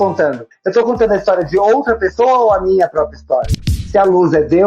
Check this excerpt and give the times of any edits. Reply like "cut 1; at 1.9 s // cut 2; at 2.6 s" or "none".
cut 1; at 3.7 s